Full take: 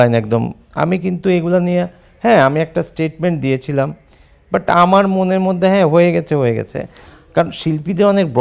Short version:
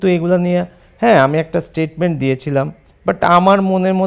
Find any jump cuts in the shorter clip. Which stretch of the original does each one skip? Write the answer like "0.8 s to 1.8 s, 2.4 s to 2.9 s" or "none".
4.1 s to 4.3 s